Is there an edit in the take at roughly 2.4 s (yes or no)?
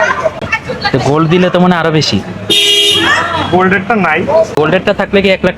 no